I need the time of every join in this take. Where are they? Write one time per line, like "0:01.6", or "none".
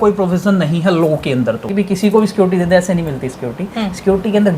0:01.6